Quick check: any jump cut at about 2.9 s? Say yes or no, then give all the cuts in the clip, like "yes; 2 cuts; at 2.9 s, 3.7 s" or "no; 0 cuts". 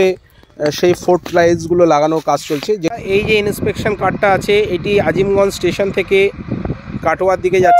yes; 1 cut; at 2.9 s